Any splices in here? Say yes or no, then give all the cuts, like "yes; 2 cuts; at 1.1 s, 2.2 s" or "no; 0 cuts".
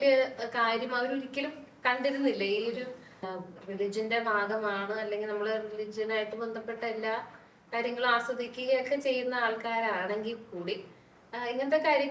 no; 0 cuts